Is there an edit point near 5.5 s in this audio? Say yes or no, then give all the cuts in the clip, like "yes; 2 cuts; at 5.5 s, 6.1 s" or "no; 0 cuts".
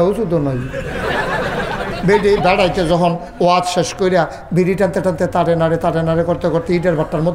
no; 1 cut; at 1.9 s